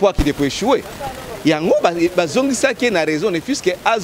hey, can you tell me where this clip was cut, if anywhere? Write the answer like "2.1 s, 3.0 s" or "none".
none